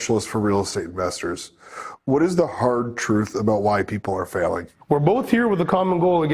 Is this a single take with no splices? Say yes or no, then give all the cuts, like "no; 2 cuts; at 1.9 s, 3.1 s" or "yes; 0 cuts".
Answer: no; 1 cut; at 4.7 s